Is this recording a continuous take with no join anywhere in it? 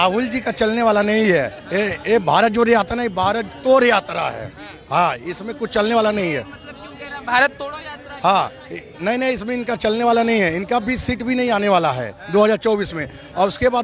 yes; 0 cuts

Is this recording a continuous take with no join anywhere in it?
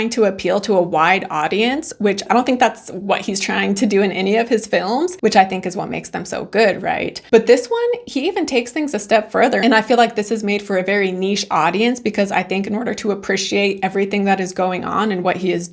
no; 2 cuts; at 2.2 s, 5.1 s

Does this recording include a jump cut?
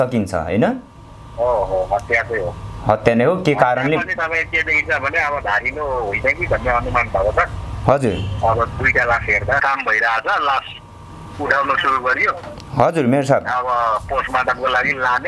yes; 1 cut; at 9.6 s

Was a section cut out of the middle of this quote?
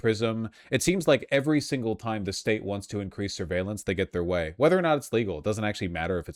no; 0 cuts

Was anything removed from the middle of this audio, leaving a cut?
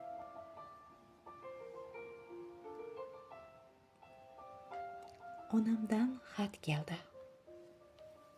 yes; 1 cut; at 3.4 s

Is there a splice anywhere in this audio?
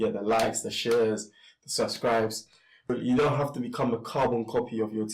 yes; 1 cut; at 2.8 s

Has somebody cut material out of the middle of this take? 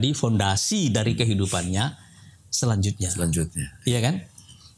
no; 0 cuts

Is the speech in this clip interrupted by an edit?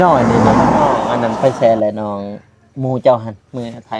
yes; 1 cut; at 1.0 s

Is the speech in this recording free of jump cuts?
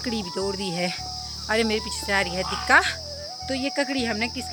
yes; 0 cuts

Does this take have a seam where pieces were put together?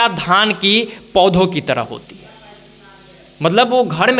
no; 0 cuts

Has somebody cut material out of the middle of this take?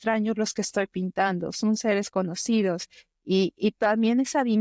no; 0 cuts

